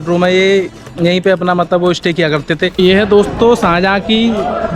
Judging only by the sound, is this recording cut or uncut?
cut